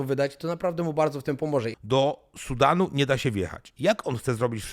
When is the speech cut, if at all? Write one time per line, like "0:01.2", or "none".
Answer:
0:01.7
0:03.6